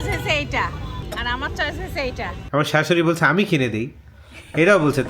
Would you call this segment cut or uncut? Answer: cut